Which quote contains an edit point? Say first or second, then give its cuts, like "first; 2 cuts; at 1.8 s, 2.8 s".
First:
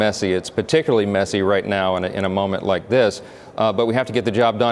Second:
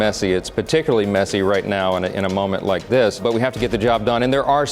second; 1 cut; at 3.2 s